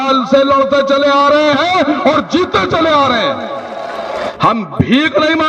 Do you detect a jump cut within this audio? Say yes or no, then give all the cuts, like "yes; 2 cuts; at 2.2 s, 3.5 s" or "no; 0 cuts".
yes; 1 cut; at 4.3 s